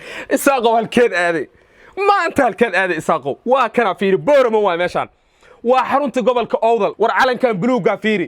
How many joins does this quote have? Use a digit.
1